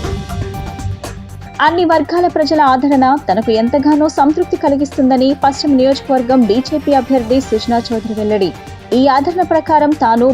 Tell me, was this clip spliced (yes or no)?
yes